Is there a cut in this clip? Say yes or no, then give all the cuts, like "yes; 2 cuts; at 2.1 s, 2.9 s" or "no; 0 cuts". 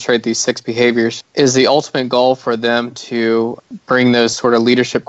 yes; 2 cuts; at 1.2 s, 3.6 s